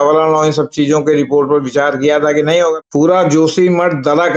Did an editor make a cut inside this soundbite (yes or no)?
yes